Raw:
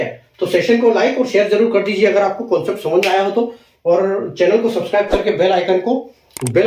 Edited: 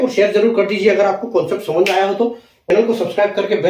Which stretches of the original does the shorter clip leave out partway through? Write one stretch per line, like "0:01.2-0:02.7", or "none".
0:03.9-0:04.5

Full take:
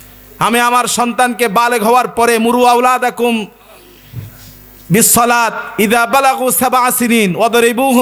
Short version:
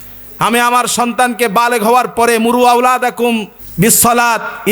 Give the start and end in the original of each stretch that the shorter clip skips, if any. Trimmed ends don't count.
0:03.6-0:04.7

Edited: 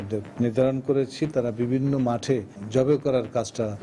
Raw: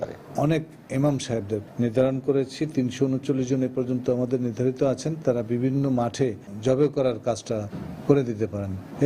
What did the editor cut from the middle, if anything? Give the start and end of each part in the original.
0:02.7-0:05.2

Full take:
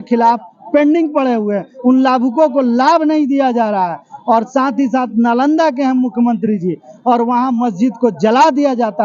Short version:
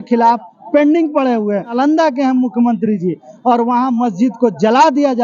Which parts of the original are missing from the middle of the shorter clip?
0:01.7-0:05.3

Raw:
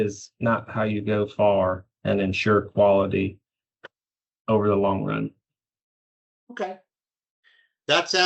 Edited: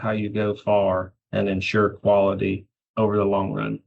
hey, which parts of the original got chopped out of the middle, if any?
0:03.5-0:04.3

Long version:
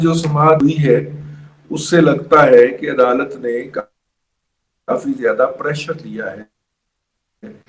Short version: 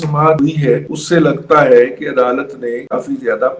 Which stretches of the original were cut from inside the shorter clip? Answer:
0:01.1-0:01.7
0:03.7-0:04.8

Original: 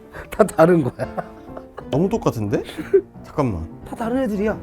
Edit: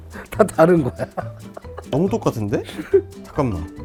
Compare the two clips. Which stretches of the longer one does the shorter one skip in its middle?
none

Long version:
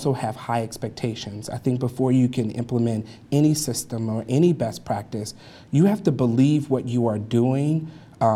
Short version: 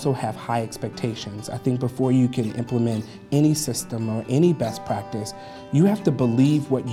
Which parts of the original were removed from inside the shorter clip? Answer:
none

